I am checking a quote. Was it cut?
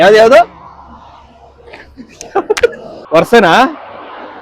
yes; 1 cut; at 2.9 s

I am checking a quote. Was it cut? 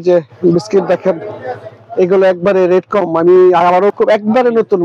yes; 1 cut; at 3.9 s

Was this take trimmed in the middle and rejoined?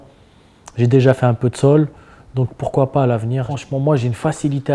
yes; 1 cut; at 3.5 s

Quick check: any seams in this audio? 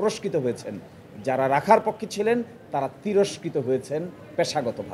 no; 0 cuts

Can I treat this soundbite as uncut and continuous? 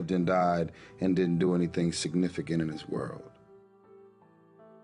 no; 1 cut; at 3.2 s

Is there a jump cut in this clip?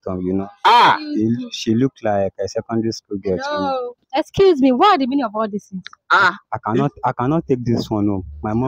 no; 0 cuts

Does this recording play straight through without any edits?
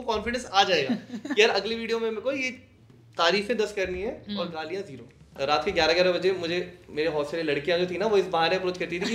no; 1 cut; at 5.3 s

